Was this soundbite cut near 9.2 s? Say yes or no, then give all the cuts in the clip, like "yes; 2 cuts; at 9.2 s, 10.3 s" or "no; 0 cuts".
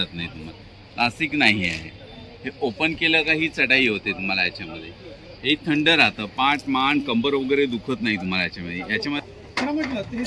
yes; 1 cut; at 9.2 s